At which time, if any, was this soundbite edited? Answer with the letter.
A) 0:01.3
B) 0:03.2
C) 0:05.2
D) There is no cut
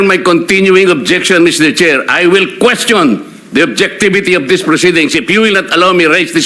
D